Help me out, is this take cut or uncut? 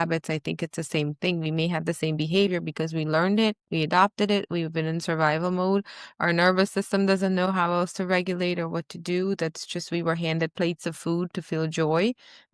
uncut